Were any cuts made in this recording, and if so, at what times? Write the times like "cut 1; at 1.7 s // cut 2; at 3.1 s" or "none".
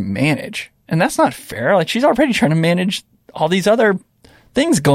none